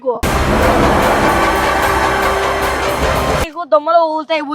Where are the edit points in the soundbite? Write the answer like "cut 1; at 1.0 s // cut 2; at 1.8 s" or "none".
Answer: cut 1; at 3.5 s